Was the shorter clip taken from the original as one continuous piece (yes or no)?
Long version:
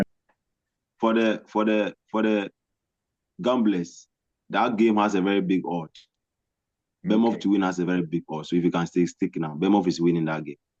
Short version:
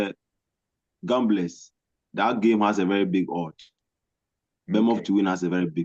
yes